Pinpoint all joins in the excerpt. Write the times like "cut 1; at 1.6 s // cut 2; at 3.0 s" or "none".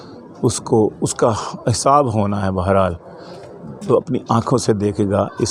none